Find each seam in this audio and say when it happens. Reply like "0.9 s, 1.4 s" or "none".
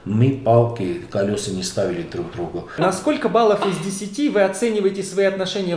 2.8 s